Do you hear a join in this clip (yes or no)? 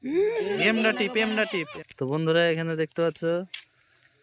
yes